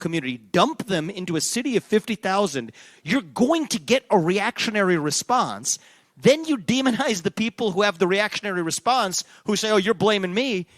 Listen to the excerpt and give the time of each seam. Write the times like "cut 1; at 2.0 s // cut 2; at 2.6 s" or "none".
none